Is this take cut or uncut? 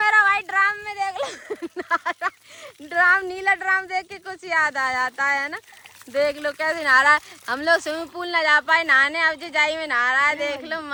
uncut